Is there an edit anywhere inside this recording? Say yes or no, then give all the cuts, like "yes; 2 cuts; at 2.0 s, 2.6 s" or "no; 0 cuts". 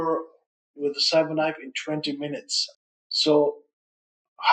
yes; 1 cut; at 2.6 s